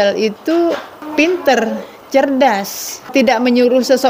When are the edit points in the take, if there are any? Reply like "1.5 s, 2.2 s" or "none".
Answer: 1.0 s, 3.0 s